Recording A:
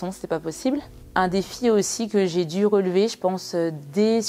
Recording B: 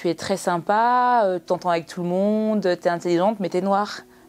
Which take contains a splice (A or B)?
A